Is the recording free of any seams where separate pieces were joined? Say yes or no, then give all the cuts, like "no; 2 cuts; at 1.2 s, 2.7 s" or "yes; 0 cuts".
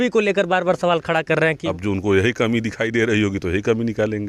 no; 1 cut; at 1.6 s